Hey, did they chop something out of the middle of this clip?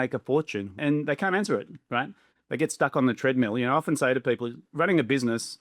yes; 2 cuts; at 0.8 s, 4.6 s

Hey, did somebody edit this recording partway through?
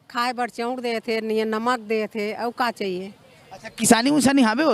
no; 0 cuts

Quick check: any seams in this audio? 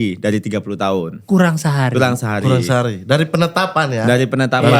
no; 0 cuts

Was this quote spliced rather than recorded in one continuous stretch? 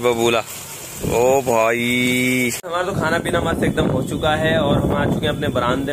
yes; 1 cut; at 2.6 s

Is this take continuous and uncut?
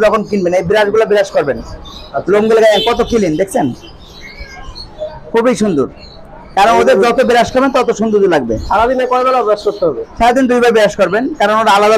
yes; 0 cuts

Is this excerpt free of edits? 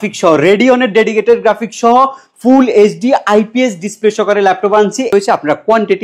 no; 1 cut; at 5.1 s

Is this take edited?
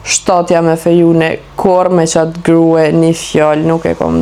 no; 0 cuts

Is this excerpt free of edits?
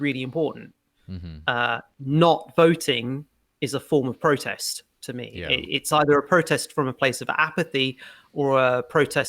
yes; 0 cuts

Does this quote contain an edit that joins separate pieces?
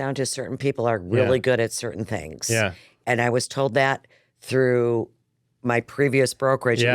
yes; 1 cut; at 2.8 s

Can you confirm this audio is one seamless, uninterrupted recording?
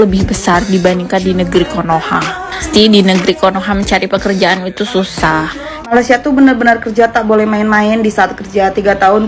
no; 2 cuts; at 2.6 s, 5.7 s

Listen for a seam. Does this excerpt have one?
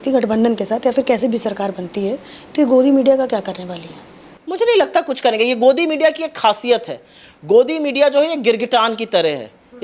no; 0 cuts

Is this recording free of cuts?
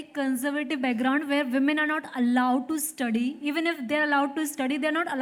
yes; 0 cuts

